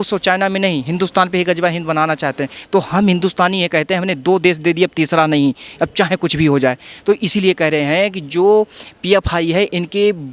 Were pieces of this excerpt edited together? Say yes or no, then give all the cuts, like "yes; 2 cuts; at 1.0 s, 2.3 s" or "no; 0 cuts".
yes; 1 cut; at 2.6 s